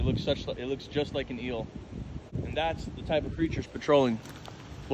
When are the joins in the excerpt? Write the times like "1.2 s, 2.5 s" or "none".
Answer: 2.4 s